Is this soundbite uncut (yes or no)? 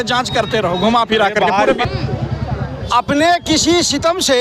no